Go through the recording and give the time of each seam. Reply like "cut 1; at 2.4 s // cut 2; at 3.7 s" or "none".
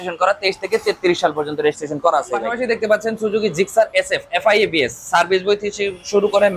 cut 1; at 2.5 s